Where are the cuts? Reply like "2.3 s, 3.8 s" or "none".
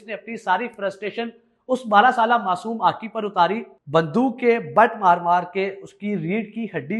3.7 s